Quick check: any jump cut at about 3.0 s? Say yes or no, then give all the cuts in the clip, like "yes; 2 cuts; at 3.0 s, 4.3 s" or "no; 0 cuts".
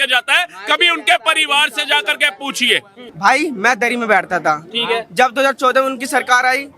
yes; 1 cut; at 3.0 s